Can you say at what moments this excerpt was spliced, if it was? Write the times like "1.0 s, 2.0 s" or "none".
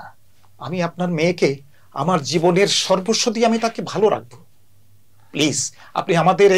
none